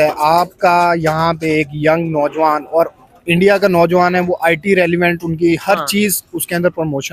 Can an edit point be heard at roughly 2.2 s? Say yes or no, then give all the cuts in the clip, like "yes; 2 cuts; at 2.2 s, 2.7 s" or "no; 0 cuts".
no; 0 cuts